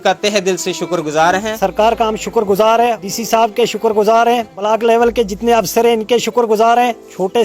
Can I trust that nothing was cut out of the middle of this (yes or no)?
no